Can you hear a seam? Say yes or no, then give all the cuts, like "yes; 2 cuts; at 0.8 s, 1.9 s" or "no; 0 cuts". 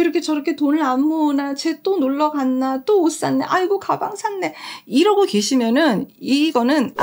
no; 0 cuts